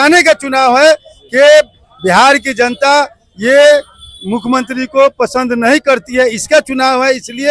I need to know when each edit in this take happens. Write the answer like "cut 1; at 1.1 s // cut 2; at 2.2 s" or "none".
none